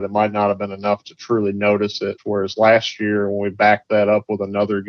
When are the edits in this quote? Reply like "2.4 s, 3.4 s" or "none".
2.2 s